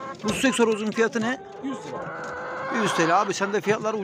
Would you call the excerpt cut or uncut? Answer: uncut